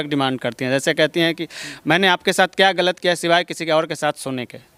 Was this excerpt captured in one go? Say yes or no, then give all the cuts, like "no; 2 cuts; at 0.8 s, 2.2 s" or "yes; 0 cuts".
yes; 0 cuts